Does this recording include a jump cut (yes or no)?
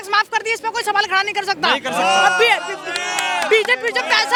no